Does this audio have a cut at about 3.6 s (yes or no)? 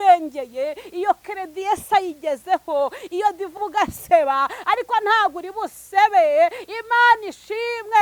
yes